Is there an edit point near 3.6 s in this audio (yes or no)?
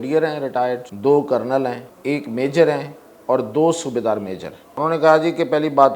no